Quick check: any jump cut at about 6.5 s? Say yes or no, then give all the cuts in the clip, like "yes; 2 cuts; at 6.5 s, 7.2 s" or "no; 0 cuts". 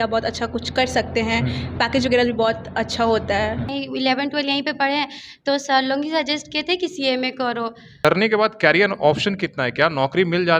no; 2 cuts; at 3.7 s, 8.0 s